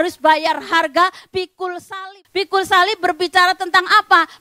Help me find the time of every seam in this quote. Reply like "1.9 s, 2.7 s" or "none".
2.0 s